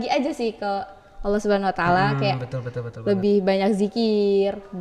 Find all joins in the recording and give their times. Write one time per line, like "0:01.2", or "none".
none